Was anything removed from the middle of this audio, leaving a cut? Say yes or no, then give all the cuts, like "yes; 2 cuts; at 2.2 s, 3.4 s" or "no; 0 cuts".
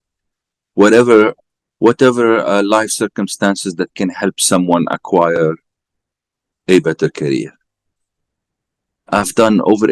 yes; 1 cut; at 1.4 s